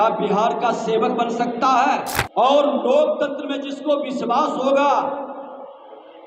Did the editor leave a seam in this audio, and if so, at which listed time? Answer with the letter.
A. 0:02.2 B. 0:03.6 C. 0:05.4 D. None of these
A